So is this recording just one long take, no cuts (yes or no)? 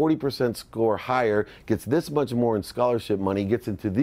yes